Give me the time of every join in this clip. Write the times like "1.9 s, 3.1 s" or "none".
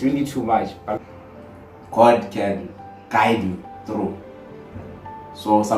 1.0 s